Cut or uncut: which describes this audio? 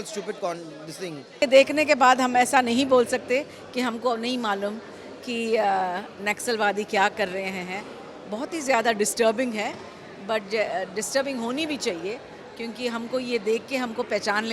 cut